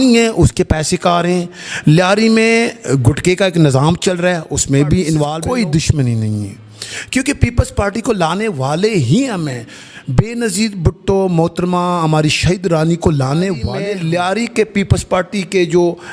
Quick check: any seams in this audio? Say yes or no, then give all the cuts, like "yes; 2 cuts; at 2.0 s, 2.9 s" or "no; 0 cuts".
yes; 2 cuts; at 5.4 s, 13.7 s